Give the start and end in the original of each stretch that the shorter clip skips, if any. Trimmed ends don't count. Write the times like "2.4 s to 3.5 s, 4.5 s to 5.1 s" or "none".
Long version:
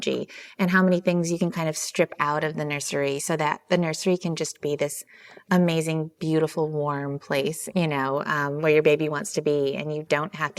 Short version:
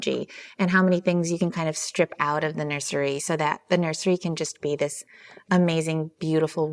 none